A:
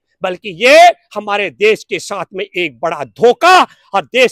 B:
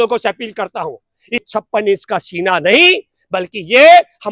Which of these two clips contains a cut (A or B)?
B